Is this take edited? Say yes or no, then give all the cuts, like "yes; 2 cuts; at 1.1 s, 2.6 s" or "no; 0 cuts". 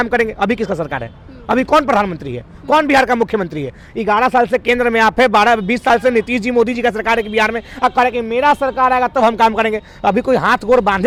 no; 0 cuts